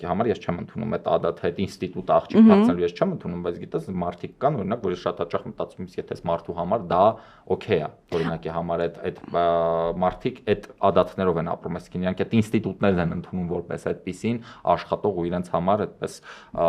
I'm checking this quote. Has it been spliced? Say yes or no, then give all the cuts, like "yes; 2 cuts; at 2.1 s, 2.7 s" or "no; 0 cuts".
no; 0 cuts